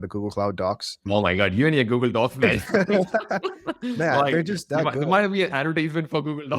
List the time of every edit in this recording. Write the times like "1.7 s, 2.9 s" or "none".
0.9 s